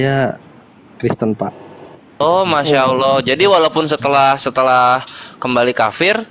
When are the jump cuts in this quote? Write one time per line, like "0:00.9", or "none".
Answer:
0:02.2